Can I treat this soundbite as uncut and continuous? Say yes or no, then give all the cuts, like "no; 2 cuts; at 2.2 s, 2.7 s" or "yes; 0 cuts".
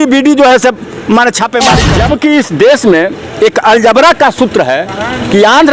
no; 1 cut; at 1.8 s